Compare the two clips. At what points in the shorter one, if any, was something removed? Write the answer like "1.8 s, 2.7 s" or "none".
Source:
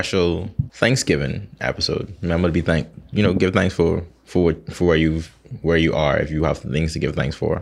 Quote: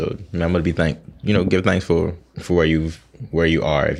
2.3 s